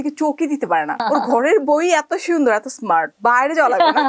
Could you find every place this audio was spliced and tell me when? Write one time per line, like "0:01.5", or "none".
0:01.0
0:03.1